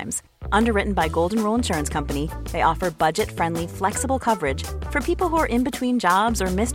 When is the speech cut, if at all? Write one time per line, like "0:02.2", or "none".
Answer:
none

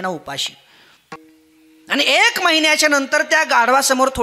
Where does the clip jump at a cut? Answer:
0:01.2

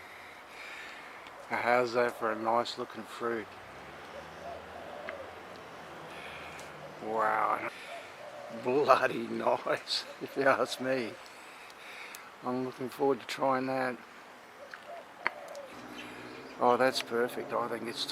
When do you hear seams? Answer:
0:07.7
0:15.7

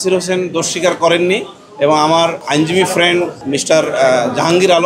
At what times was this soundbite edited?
0:02.4
0:03.4

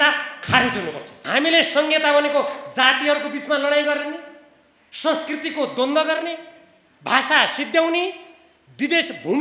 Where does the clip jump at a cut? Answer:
0:01.1

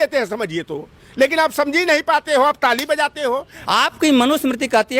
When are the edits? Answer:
0:03.5

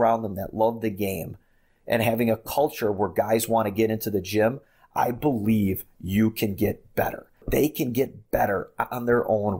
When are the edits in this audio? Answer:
0:07.4

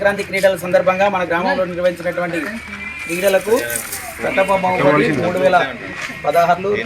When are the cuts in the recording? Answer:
none

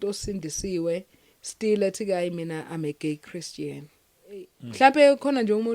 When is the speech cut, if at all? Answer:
0:04.6

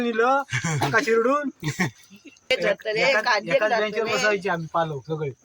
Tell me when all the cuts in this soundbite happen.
0:02.5

